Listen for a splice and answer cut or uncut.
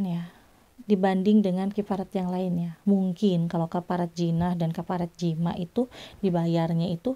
uncut